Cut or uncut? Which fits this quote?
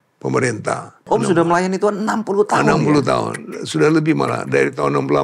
cut